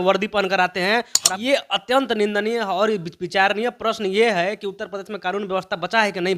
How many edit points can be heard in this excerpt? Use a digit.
1